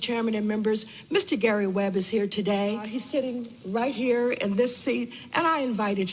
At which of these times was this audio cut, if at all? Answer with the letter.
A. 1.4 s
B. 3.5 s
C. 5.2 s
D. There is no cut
D